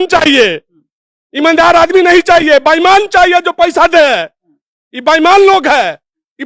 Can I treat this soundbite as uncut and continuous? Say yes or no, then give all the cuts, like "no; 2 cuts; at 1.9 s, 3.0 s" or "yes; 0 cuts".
yes; 0 cuts